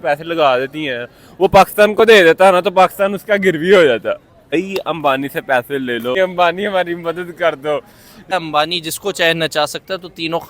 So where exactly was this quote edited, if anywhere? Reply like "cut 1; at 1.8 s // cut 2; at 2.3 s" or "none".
cut 1; at 4.6 s // cut 2; at 6.2 s // cut 3; at 8.3 s